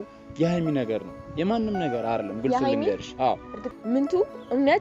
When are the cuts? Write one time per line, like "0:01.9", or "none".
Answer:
0:03.5